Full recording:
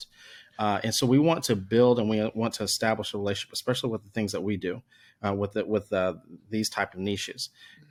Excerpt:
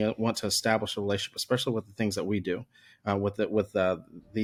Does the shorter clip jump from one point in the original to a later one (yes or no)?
no